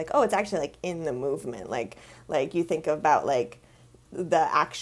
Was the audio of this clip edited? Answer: no; 0 cuts

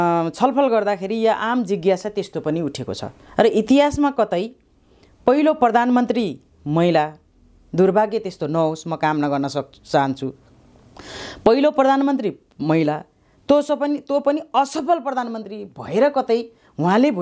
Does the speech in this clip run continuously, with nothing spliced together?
yes; 0 cuts

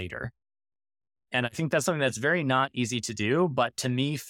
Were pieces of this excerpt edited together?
no; 0 cuts

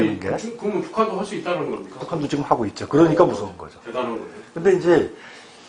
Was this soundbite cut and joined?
no; 0 cuts

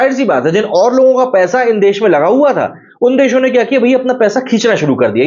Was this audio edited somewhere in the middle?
no; 0 cuts

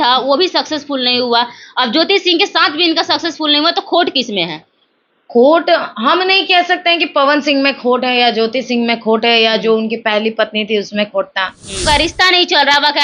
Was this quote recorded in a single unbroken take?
no; 1 cut; at 11.8 s

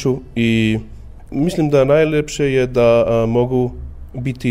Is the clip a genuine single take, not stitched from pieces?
no; 1 cut; at 1.2 s

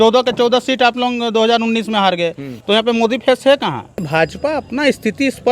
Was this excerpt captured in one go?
no; 2 cuts; at 2.5 s, 4.1 s

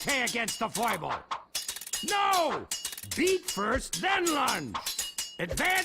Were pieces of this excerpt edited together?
yes; 1 cut; at 0.9 s

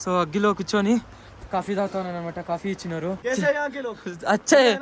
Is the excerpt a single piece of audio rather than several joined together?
no; 1 cut; at 3.2 s

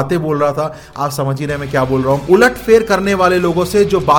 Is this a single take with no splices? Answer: no; 1 cut; at 2.2 s

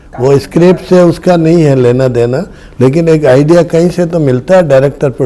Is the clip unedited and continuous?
yes; 0 cuts

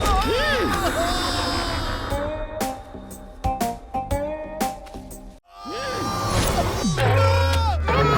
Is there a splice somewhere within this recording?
yes; 2 cuts; at 2.0 s, 5.5 s

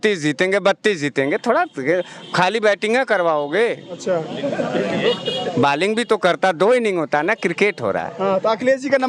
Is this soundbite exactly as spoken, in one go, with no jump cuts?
yes; 0 cuts

